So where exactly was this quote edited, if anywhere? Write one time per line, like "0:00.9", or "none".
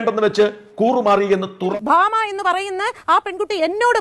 0:01.7